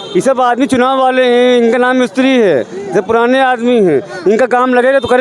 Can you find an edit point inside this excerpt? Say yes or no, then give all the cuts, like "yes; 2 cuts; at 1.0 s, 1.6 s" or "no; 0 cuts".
no; 0 cuts